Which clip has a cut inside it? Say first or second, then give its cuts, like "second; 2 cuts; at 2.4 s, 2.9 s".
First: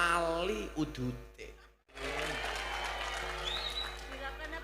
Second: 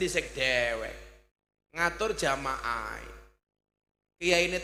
first; 1 cut; at 2.0 s